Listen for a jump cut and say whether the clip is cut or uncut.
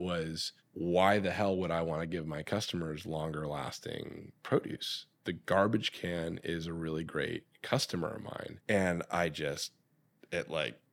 uncut